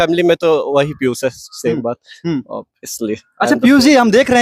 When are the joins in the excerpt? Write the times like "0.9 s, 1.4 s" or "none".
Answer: none